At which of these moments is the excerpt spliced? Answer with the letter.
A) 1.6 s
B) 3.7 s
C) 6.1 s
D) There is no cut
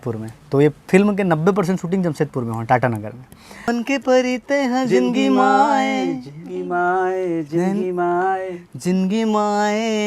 B